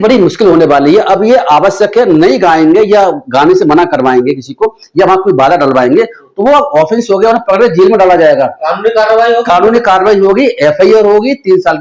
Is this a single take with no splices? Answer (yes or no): yes